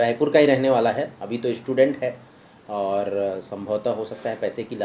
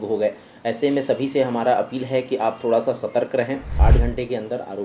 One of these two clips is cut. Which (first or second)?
second